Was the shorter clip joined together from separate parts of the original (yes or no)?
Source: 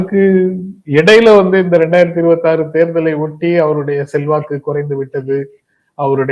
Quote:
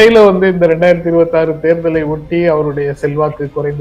no